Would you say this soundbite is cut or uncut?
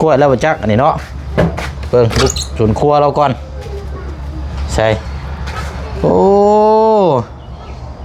uncut